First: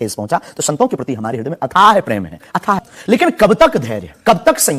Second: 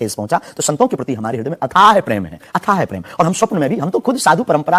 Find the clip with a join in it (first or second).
first